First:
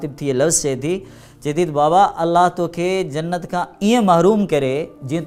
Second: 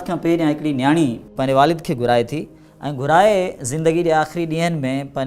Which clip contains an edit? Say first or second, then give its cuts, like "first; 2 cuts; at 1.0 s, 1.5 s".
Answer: second; 1 cut; at 1.3 s